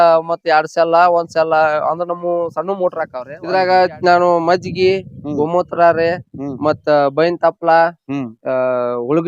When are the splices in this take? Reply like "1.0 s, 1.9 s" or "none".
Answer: 3.3 s